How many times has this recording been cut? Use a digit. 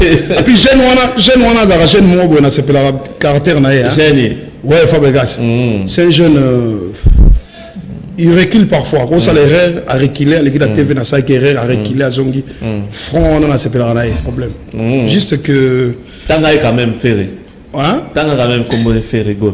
1